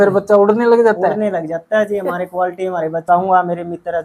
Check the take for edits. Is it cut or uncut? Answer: cut